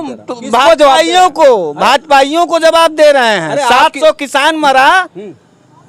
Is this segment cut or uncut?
uncut